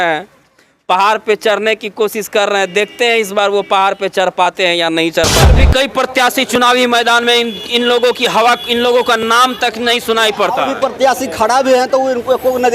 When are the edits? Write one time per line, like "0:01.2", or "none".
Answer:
0:05.5